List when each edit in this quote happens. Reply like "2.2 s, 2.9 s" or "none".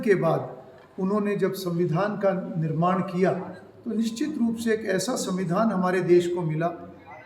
none